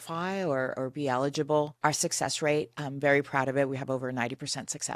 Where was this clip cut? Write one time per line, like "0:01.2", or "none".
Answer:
0:01.7